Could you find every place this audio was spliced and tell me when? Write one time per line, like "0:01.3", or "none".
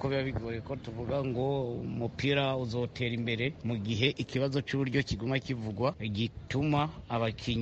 0:03.6
0:06.0

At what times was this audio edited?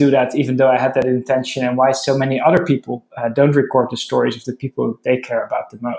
none

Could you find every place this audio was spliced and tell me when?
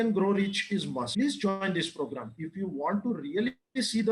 0:01.1

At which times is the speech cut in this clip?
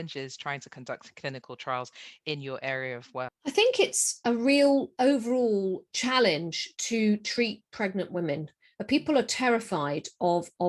0:03.3

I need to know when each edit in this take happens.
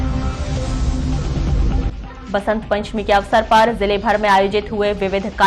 0:01.9

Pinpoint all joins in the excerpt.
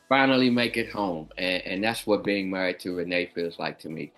none

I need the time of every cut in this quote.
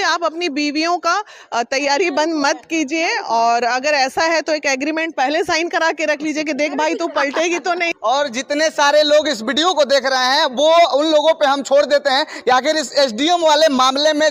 none

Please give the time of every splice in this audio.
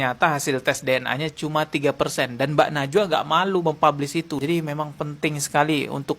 0:04.4

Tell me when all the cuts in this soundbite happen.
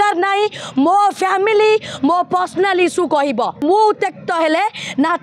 0:03.6

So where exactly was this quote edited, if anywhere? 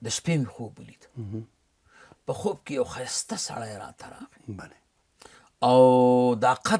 none

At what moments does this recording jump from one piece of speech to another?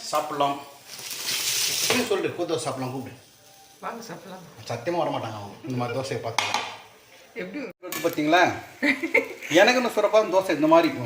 0:07.7

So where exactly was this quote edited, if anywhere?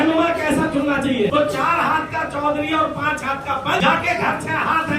0:01.3
0:03.8

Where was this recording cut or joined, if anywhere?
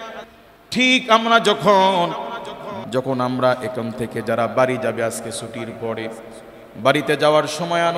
0:02.7

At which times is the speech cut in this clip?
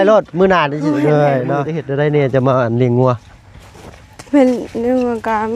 0:01.8

